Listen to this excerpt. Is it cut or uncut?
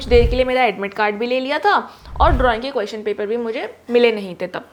uncut